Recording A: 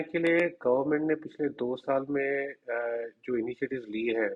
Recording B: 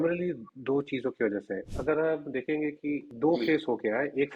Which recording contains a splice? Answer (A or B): B